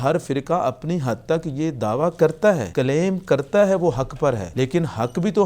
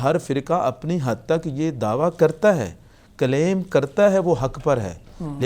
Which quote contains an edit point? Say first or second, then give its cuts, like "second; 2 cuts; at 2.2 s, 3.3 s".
first; 2 cuts; at 2.7 s, 4.5 s